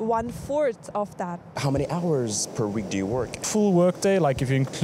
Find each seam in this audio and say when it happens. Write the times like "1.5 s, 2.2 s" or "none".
1.5 s